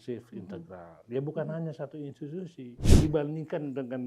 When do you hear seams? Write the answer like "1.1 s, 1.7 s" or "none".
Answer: 2.8 s